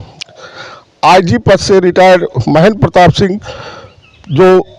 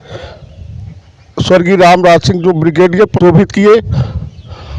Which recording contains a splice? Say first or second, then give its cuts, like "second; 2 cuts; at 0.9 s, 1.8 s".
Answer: second; 1 cut; at 3.1 s